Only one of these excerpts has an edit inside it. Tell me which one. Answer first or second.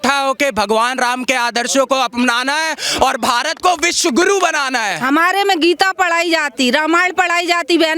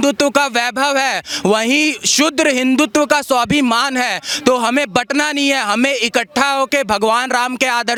first